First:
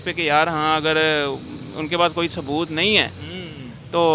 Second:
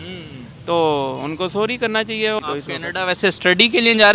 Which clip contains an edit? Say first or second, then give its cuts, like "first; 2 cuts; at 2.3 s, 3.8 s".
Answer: second; 1 cut; at 2.4 s